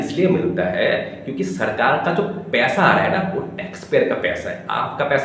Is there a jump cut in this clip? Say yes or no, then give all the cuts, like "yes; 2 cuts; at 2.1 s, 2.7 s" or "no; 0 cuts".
no; 0 cuts